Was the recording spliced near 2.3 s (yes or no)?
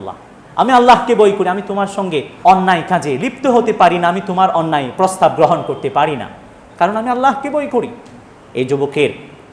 yes